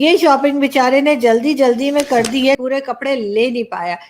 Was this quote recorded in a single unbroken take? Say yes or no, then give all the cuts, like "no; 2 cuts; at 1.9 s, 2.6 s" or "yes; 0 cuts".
no; 1 cut; at 2.6 s